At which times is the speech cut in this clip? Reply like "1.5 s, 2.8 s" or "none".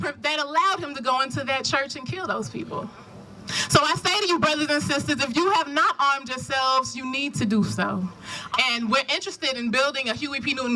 2.9 s, 8.3 s